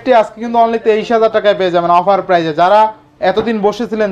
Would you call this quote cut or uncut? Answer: uncut